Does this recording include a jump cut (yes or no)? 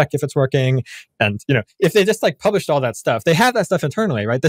no